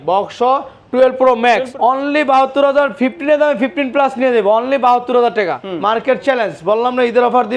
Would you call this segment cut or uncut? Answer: cut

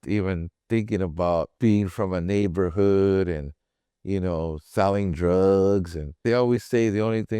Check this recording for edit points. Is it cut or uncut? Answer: cut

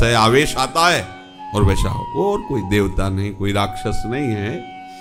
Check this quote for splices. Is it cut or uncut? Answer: uncut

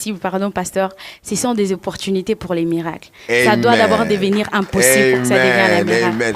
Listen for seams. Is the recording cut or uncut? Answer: uncut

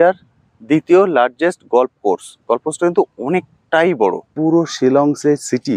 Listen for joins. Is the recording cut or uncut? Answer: cut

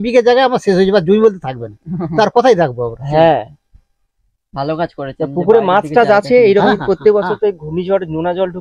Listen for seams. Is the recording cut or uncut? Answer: uncut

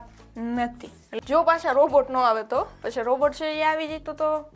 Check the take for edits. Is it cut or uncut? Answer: cut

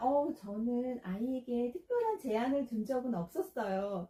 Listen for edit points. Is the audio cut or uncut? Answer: uncut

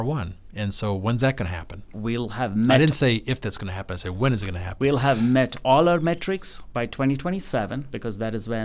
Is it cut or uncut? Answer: uncut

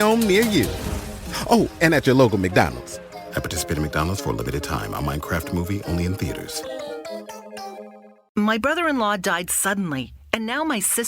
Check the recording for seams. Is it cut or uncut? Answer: cut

